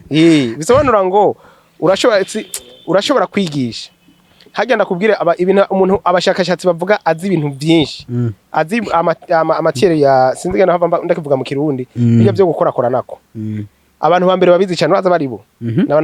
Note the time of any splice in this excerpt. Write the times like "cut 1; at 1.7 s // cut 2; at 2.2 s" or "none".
none